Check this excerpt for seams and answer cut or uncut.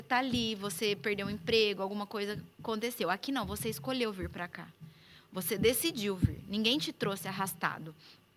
uncut